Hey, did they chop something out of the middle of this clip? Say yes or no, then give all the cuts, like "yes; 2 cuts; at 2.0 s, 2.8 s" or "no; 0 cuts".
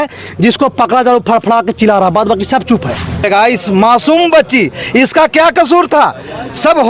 yes; 1 cut; at 3.3 s